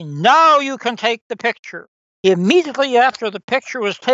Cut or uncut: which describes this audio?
cut